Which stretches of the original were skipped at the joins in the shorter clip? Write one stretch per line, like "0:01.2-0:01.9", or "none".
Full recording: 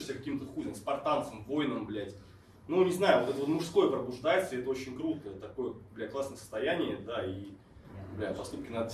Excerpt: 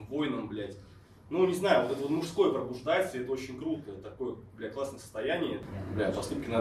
0:07.0-0:07.9